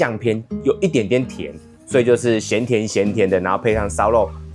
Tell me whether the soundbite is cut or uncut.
uncut